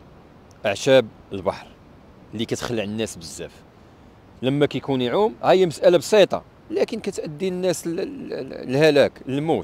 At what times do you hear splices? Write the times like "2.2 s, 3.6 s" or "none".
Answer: none

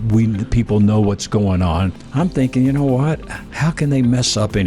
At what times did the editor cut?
2.0 s

